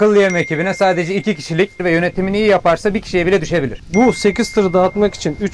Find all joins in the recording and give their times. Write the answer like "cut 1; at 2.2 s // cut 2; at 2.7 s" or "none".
cut 1; at 1.8 s // cut 2; at 3.8 s